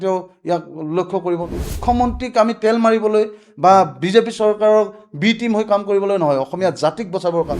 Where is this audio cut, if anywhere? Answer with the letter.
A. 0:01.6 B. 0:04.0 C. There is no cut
A